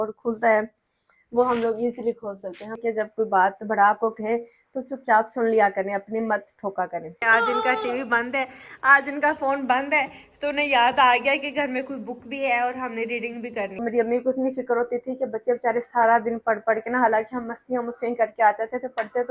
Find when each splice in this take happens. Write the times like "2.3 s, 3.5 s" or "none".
2.8 s, 7.2 s, 13.8 s